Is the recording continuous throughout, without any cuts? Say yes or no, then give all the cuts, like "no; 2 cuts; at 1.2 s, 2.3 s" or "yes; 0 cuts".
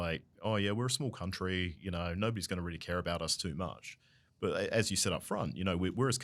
yes; 0 cuts